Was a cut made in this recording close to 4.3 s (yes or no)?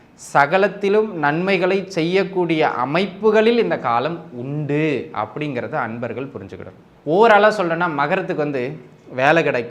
no